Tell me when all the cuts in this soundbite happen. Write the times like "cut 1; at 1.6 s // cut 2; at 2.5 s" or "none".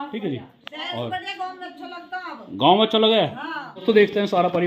cut 1; at 3.8 s